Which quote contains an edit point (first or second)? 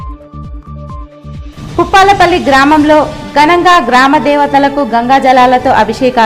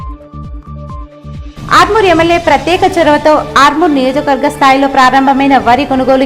second